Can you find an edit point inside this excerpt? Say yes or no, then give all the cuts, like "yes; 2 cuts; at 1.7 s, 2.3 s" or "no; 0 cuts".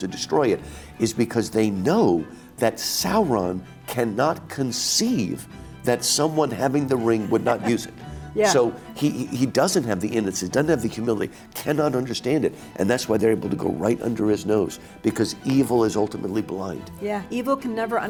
no; 0 cuts